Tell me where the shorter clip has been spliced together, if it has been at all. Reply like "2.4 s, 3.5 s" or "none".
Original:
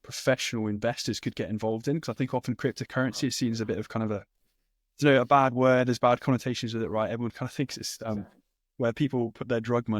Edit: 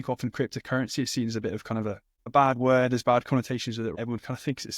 2.3 s, 4.0 s